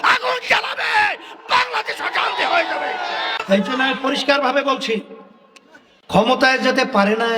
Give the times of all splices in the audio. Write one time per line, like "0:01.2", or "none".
none